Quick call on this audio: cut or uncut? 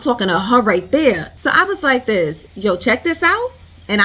cut